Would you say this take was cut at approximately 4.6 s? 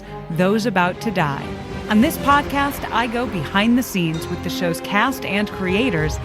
no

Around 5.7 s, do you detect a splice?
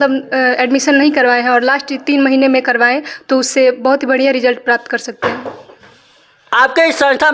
no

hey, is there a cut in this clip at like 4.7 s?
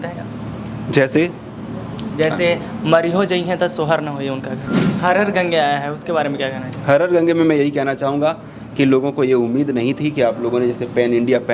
yes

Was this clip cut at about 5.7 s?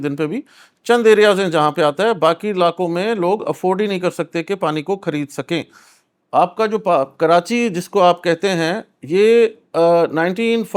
no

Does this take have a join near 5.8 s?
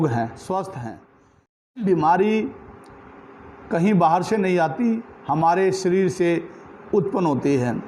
no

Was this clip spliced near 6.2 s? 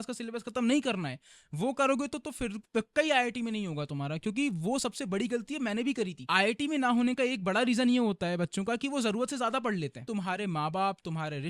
yes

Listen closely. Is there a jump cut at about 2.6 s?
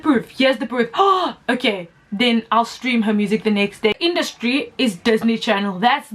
no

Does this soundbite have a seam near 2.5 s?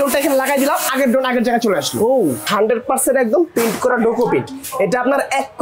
yes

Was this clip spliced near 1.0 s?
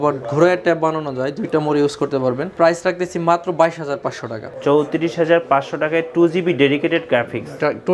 no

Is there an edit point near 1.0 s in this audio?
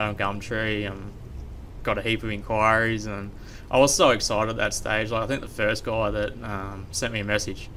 no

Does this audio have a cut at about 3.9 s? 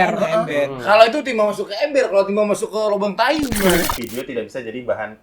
yes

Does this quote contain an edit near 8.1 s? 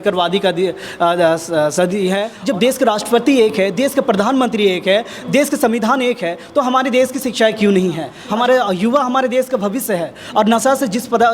yes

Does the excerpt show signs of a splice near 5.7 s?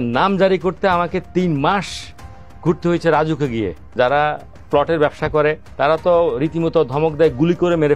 yes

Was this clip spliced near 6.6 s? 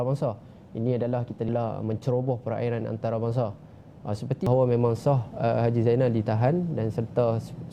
no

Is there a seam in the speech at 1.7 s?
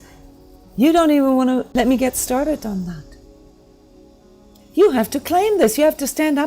yes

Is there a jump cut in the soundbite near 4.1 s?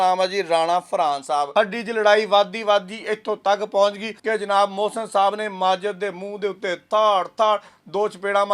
yes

